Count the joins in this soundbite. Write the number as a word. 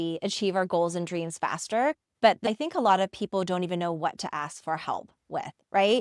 one